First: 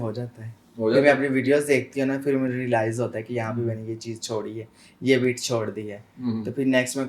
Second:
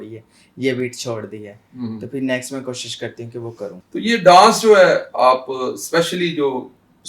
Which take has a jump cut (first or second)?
second